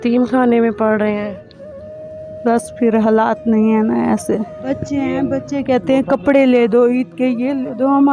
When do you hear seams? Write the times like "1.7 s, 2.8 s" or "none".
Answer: 4.7 s